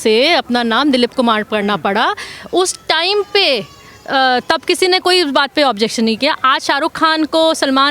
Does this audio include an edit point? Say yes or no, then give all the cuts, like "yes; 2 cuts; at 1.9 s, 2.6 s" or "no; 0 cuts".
no; 0 cuts